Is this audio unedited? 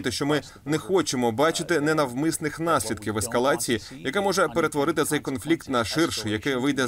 yes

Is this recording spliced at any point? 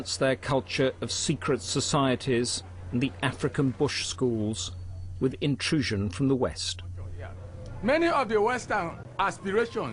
no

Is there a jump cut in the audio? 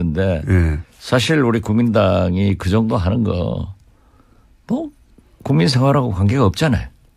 no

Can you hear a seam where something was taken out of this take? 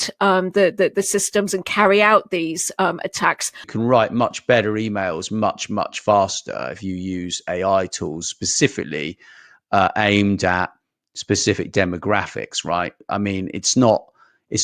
yes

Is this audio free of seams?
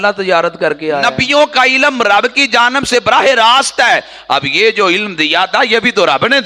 no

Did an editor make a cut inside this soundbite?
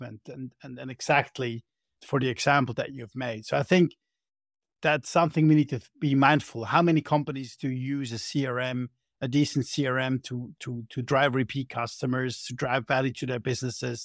yes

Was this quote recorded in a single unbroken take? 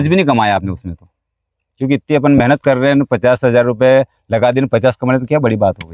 yes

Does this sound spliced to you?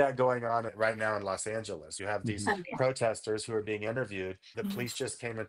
yes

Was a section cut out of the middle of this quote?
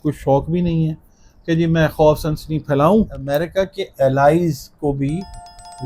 yes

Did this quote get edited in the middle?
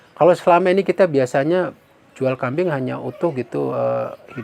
no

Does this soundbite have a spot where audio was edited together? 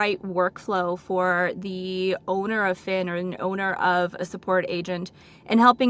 no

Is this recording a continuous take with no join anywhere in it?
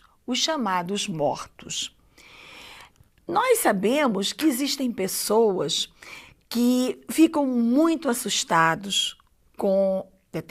no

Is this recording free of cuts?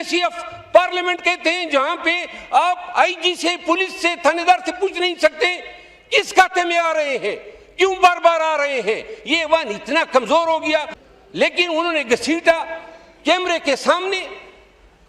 no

